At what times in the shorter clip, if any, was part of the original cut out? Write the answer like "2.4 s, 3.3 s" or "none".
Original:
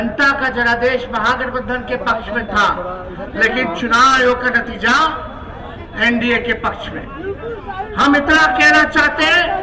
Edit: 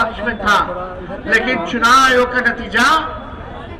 none